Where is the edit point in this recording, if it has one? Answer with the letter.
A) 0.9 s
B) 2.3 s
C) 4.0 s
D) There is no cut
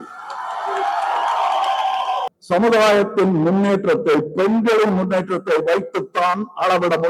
B